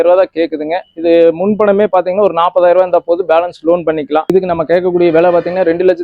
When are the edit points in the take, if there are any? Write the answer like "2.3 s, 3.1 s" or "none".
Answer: 4.3 s